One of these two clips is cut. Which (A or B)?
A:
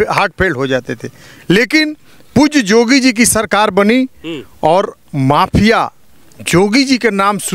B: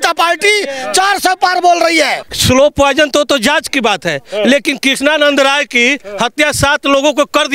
B